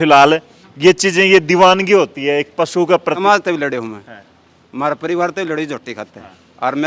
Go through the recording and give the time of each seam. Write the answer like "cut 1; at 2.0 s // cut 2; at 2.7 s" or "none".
cut 1; at 3.2 s